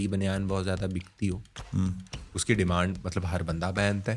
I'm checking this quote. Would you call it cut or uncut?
uncut